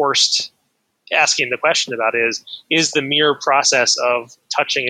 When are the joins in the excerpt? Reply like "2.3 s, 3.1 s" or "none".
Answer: none